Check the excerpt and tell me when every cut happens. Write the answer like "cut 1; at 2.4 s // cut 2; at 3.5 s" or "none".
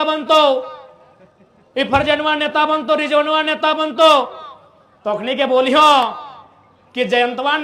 none